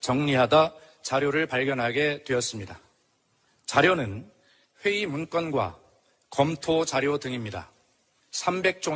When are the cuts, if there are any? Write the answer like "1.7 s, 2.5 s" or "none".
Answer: none